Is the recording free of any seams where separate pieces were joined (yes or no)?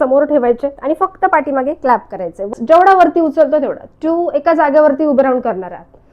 no